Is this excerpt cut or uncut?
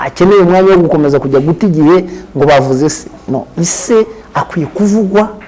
uncut